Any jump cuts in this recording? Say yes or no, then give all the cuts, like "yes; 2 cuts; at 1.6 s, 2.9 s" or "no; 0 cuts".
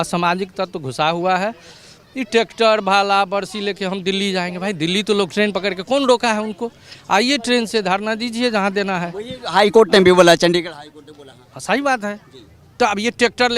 no; 0 cuts